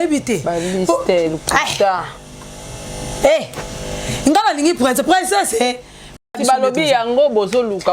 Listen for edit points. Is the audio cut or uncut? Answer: cut